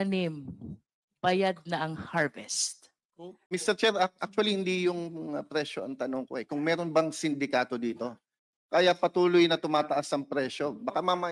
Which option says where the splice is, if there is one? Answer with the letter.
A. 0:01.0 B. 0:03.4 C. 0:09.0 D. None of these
B